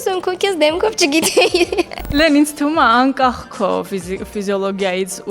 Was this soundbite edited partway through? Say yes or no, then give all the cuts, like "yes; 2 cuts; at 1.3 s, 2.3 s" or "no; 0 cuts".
yes; 1 cut; at 2.1 s